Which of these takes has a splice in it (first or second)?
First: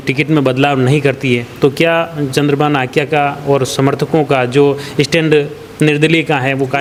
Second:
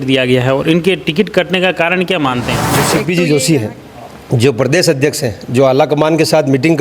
second